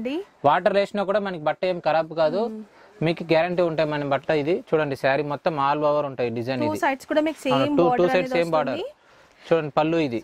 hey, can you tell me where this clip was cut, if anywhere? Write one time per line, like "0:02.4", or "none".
none